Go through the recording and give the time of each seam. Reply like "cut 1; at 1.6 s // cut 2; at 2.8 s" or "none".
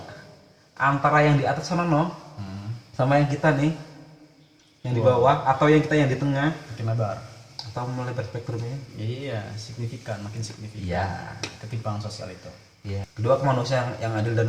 cut 1; at 13.1 s

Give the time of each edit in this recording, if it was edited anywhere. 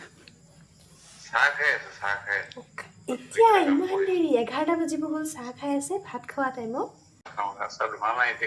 cut 1; at 7.3 s

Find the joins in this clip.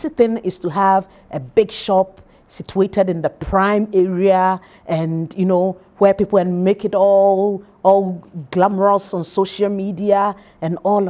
none

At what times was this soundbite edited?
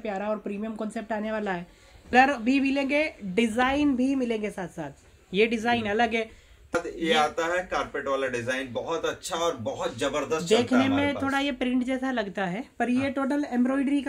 cut 1; at 2.1 s // cut 2; at 6.7 s

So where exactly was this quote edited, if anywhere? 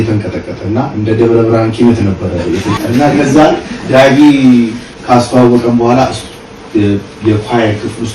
cut 1; at 2.8 s // cut 2; at 4.9 s

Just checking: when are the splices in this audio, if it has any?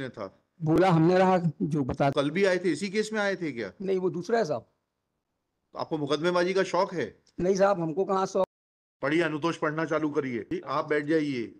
cut 1; at 2.1 s // cut 2; at 8.5 s // cut 3; at 10.5 s

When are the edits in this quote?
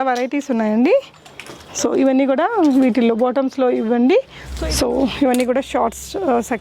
cut 1; at 4.4 s

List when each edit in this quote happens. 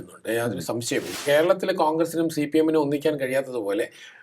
cut 1; at 1.1 s

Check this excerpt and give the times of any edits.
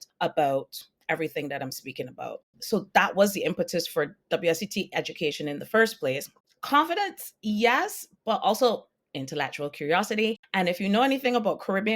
cut 1; at 6.4 s

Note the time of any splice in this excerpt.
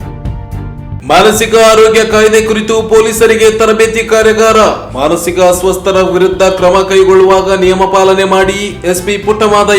cut 1; at 1.0 s

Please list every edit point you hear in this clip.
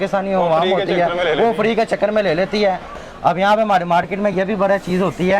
cut 1; at 3.0 s

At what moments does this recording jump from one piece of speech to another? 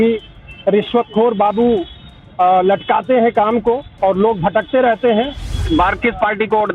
cut 1; at 5.6 s

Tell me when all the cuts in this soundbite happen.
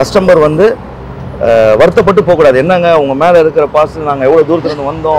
none

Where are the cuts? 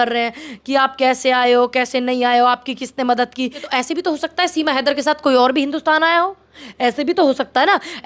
cut 1; at 3.6 s

